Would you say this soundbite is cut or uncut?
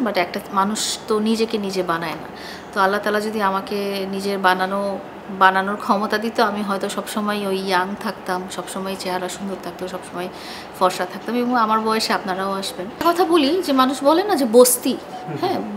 cut